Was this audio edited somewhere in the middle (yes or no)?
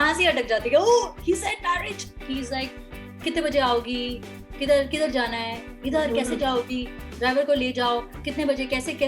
yes